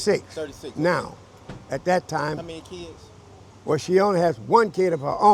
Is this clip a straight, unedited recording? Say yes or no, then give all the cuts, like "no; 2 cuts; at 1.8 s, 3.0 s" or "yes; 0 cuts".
yes; 0 cuts